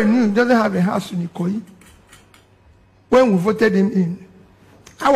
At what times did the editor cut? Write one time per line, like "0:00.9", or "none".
none